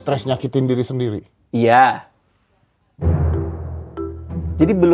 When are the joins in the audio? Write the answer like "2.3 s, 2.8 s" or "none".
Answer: none